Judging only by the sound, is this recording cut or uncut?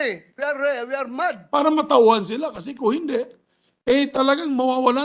cut